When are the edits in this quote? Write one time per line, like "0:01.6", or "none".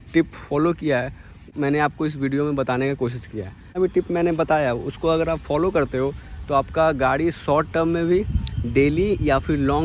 0:01.4
0:03.8